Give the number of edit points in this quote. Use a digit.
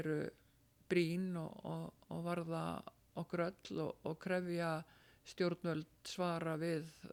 0